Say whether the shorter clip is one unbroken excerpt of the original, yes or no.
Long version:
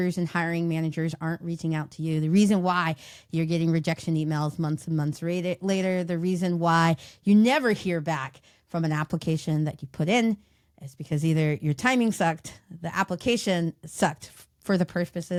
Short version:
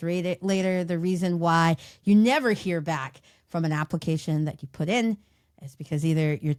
yes